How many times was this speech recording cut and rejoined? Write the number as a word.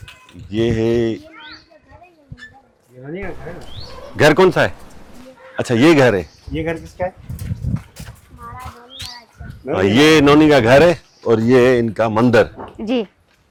zero